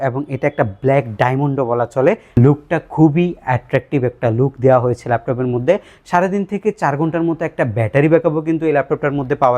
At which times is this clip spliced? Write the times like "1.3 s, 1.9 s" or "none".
2.2 s